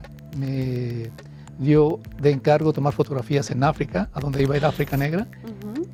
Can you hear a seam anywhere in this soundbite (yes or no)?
no